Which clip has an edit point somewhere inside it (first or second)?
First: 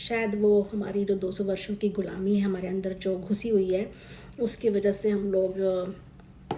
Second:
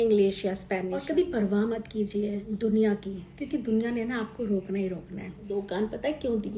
second